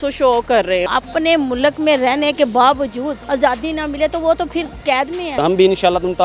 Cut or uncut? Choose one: cut